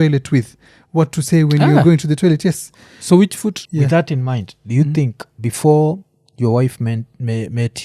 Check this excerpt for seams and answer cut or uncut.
cut